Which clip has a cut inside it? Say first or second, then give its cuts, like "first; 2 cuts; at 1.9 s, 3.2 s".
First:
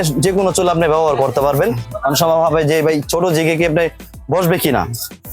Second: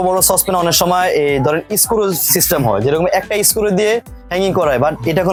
first; 1 cut; at 1.9 s